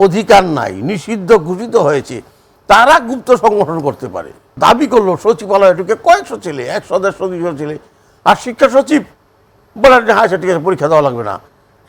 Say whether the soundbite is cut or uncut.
cut